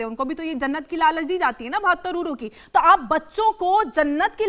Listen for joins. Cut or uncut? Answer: uncut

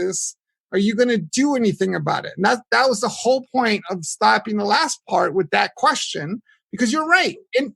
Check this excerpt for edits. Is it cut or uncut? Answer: uncut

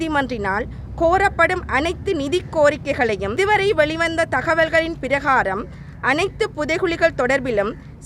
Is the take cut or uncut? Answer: cut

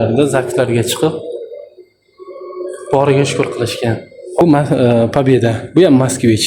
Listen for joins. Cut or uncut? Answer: cut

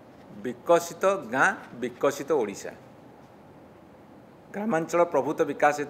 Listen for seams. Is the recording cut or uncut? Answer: uncut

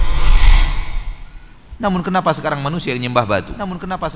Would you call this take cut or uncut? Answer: cut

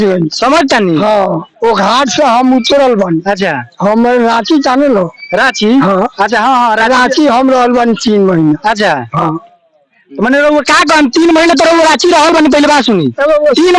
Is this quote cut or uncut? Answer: uncut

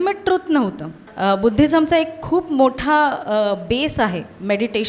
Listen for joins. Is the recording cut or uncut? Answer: cut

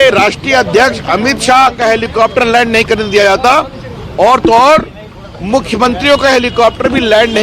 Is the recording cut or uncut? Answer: uncut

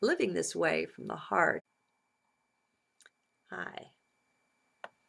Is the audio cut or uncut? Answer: uncut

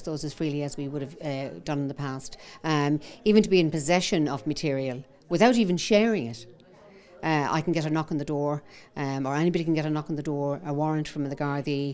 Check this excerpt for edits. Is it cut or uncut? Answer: uncut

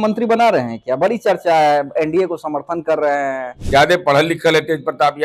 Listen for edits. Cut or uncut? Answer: cut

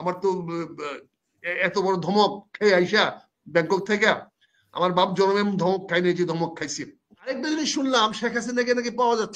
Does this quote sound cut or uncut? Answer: cut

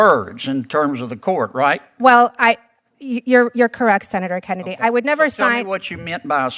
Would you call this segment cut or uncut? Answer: uncut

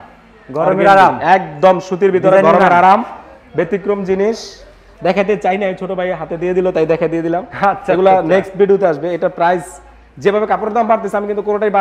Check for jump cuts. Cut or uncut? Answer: uncut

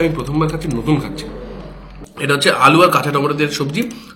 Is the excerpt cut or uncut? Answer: uncut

